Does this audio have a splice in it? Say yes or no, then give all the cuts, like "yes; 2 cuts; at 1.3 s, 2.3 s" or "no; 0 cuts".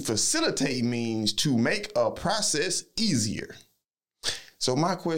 no; 0 cuts